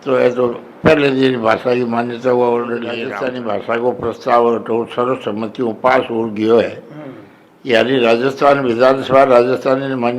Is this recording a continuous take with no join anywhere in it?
no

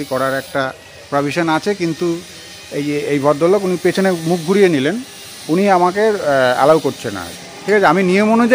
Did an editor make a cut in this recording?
no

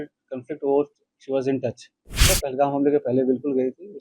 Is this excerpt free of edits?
no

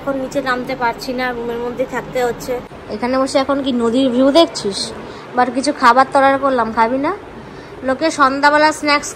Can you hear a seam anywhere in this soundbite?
yes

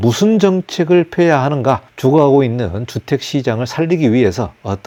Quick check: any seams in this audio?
no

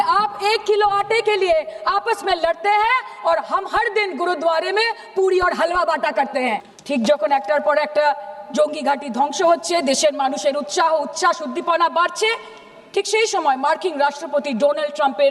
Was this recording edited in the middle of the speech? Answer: yes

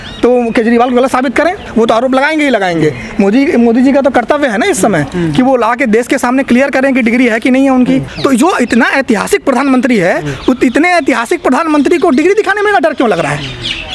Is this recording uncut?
no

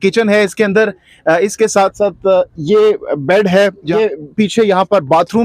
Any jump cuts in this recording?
yes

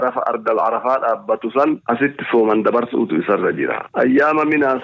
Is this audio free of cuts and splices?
yes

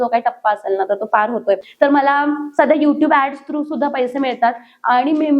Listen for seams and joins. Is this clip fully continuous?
no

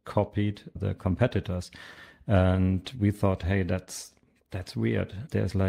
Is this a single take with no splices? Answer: yes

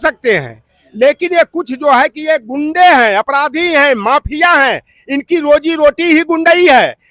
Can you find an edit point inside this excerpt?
no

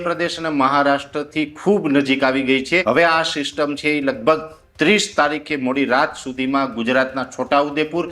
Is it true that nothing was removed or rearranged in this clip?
no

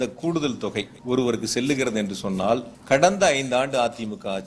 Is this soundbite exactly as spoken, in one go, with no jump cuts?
no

